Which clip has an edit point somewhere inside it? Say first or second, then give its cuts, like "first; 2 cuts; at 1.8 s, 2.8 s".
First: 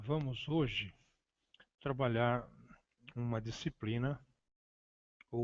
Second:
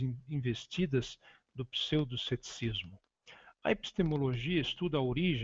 second; 1 cut; at 2.9 s